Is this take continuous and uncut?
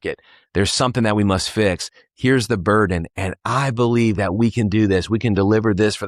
yes; 0 cuts

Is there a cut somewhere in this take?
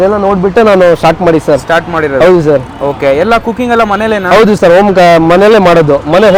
no; 0 cuts

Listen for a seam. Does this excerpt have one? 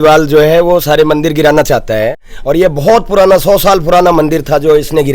yes; 1 cut; at 2.2 s

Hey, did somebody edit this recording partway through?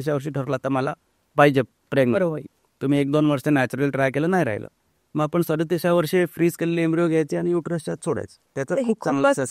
no; 0 cuts

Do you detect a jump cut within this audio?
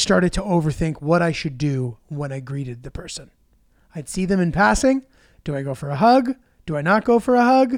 no; 0 cuts

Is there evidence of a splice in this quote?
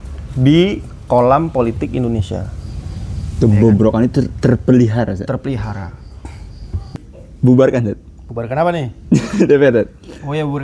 yes; 1 cut; at 7.0 s

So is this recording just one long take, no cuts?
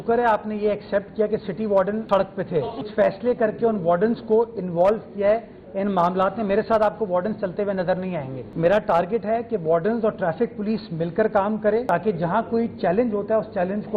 no; 3 cuts; at 2.9 s, 8.4 s, 11.8 s

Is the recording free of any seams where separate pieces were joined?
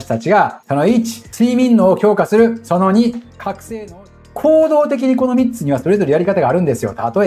no; 1 cut; at 4.2 s

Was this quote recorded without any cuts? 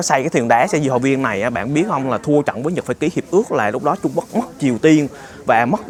yes; 0 cuts

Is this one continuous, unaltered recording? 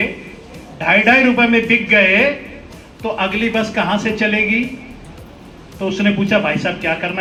yes; 0 cuts

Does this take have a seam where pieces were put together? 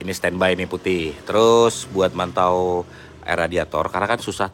no; 0 cuts

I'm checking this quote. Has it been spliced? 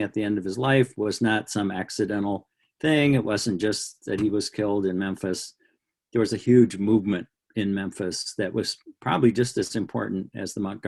no; 0 cuts

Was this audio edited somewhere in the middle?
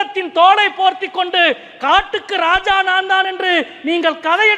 no; 0 cuts

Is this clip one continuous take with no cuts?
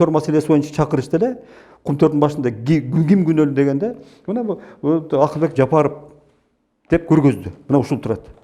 yes; 0 cuts

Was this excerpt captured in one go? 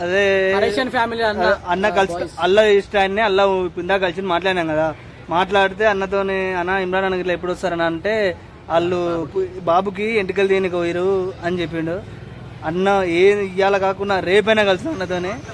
yes; 0 cuts

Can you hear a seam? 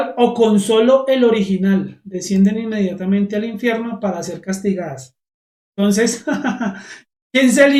no; 0 cuts

